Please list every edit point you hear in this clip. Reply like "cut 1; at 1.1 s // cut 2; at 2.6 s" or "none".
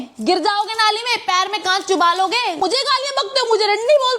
cut 1; at 2.6 s